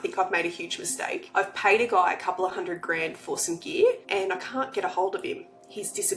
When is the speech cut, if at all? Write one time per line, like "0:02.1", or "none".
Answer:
0:01.2
0:04.0